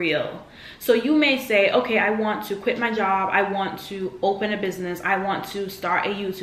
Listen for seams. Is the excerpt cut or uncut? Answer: uncut